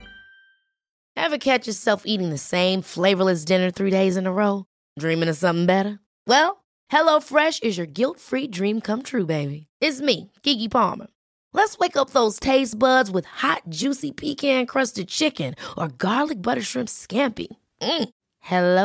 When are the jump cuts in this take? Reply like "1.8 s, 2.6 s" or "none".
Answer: none